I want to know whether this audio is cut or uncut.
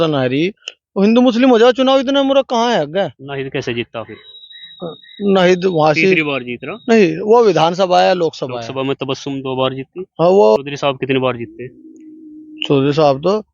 cut